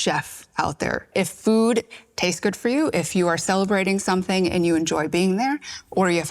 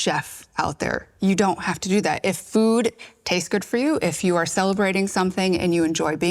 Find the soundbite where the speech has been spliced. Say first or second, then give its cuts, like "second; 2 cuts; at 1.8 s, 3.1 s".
first; 1 cut; at 1.1 s